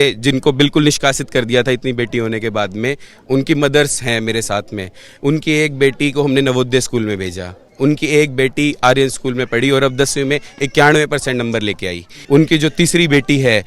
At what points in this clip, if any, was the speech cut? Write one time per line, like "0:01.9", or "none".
0:12.2